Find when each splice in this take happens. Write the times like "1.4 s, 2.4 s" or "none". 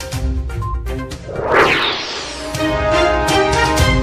none